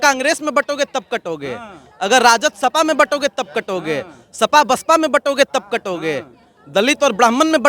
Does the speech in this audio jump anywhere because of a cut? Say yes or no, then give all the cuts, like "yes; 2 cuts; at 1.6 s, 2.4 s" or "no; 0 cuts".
no; 0 cuts